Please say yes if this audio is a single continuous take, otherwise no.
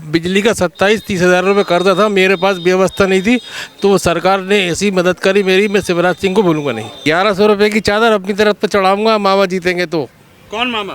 no